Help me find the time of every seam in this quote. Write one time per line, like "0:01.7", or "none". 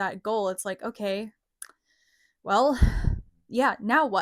none